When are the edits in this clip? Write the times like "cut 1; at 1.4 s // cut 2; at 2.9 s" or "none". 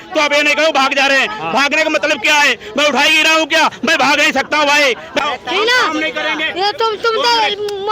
cut 1; at 5.2 s